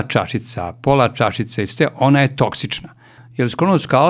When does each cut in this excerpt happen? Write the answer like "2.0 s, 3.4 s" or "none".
3.2 s